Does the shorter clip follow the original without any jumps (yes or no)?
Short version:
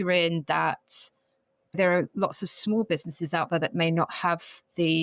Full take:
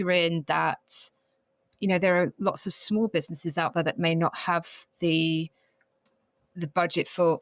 no